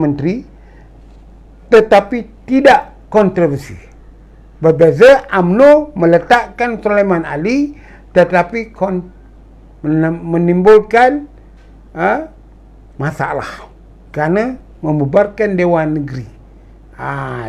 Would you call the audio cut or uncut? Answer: uncut